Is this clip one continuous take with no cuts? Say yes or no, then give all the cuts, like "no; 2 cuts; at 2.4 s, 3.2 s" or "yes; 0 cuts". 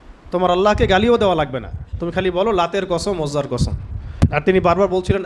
no; 1 cut; at 4.4 s